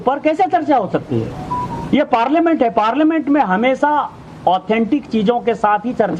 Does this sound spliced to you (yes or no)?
no